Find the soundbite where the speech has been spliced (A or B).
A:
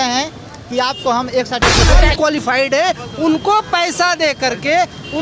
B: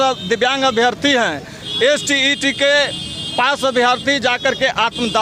A